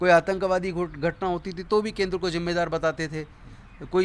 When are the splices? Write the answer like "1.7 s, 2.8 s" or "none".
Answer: none